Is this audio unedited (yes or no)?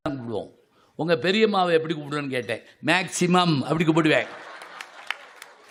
yes